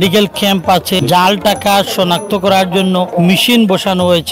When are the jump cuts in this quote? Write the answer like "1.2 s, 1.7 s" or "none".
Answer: 1.0 s, 3.1 s